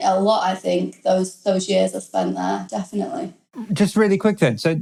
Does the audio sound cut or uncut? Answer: uncut